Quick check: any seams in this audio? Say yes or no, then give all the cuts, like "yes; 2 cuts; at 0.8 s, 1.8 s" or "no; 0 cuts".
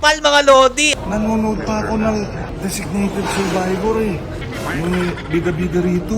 yes; 3 cuts; at 0.8 s, 2.5 s, 4.4 s